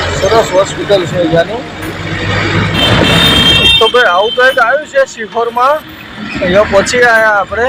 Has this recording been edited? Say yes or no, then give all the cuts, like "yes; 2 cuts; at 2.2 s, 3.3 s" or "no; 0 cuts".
yes; 1 cut; at 2.7 s